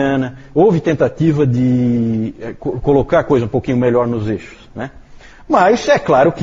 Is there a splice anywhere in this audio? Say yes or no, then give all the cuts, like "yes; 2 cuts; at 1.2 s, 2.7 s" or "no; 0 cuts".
yes; 1 cut; at 2.5 s